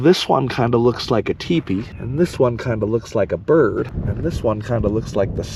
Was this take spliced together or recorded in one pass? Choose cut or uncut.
cut